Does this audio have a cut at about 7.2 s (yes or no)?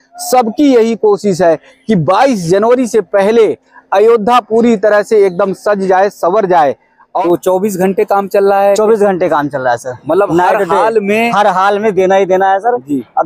yes